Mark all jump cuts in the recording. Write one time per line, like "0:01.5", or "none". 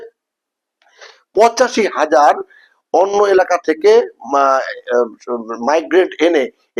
none